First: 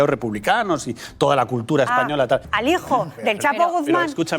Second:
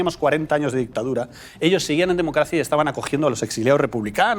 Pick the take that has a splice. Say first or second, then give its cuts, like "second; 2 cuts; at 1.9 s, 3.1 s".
first; 1 cut; at 2.4 s